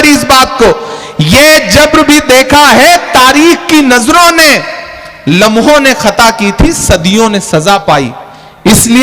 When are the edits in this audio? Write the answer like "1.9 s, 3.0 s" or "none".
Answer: none